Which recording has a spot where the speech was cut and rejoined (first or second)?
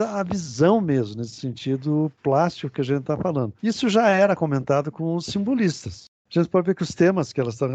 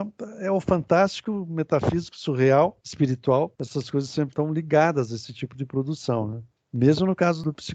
first